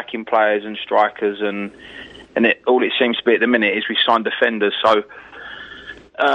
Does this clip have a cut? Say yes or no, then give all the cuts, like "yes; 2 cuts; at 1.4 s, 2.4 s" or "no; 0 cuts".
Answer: yes; 1 cut; at 2.5 s